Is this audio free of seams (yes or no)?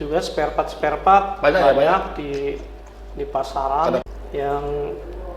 no